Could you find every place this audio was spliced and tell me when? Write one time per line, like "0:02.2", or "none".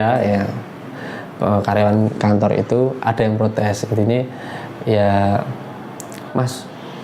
none